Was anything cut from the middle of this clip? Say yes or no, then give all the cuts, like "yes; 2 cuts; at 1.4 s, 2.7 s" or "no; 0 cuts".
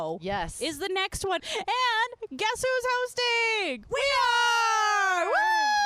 yes; 2 cuts; at 1.4 s, 3.8 s